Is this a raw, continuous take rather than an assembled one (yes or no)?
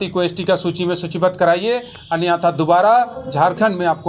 yes